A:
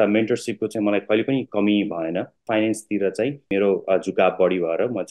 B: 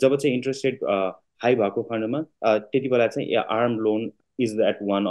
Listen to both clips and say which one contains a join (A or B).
A